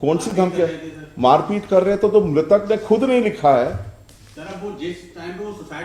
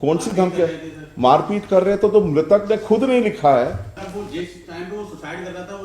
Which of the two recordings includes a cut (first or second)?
second